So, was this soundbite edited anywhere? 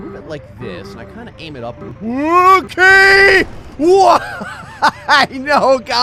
no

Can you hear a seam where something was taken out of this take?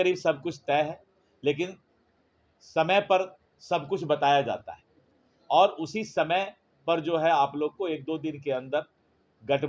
no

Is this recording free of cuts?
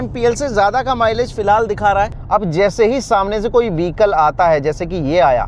no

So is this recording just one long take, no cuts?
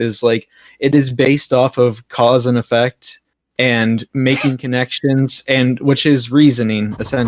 yes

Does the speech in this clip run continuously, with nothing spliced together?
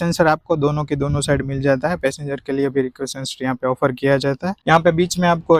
no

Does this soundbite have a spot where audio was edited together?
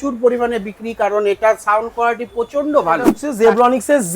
yes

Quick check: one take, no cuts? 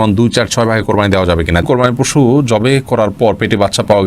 no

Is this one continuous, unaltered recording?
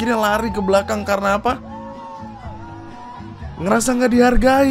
yes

